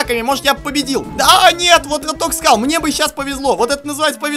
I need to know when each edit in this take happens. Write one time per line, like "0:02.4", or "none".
0:01.1